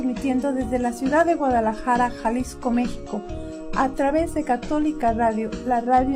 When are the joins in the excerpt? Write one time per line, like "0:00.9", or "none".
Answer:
none